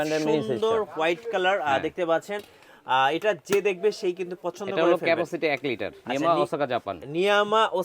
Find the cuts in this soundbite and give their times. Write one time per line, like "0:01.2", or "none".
0:05.9